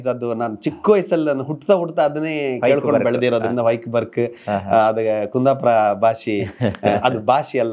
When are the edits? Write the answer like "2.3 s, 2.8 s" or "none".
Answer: none